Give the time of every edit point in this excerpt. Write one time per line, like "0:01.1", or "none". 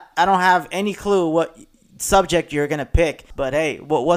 0:03.3

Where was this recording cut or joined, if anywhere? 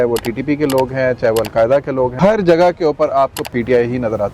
0:02.1
0:03.4

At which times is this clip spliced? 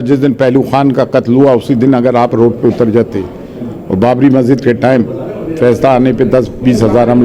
none

